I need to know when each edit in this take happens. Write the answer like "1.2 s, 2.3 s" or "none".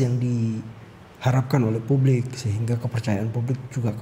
none